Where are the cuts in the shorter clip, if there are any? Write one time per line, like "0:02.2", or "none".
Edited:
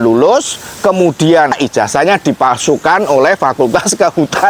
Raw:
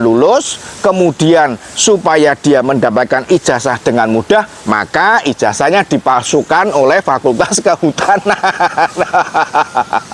0:01.6